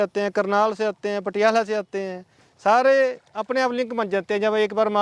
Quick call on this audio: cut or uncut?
uncut